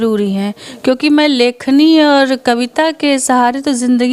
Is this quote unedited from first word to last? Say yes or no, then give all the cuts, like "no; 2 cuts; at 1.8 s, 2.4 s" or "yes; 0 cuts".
yes; 0 cuts